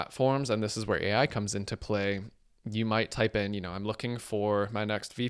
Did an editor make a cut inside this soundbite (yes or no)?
no